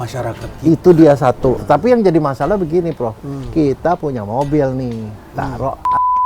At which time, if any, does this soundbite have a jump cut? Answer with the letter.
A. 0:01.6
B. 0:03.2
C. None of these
A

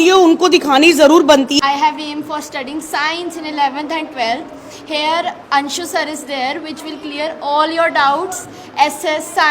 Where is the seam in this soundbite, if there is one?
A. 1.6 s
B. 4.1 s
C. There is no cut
A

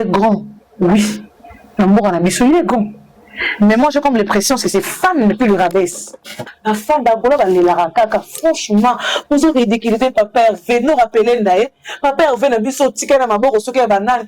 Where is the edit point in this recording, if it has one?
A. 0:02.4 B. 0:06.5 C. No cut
B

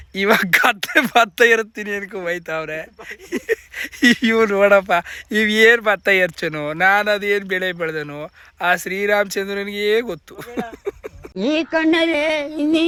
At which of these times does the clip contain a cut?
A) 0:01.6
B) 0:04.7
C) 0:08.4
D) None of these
D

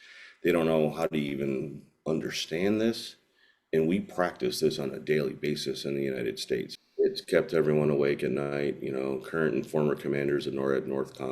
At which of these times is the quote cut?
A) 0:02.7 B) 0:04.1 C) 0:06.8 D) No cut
C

